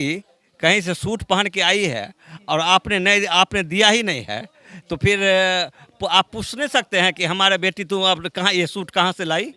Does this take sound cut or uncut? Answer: uncut